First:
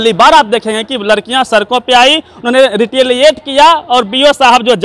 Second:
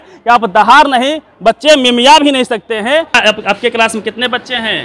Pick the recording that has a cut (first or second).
second